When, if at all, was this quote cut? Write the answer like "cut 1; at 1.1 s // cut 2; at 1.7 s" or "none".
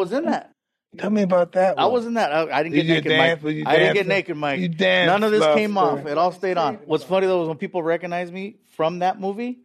cut 1; at 6.7 s